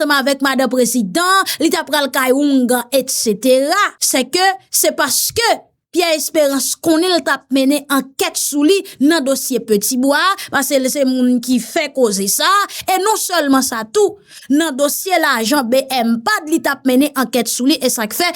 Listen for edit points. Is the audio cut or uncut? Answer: cut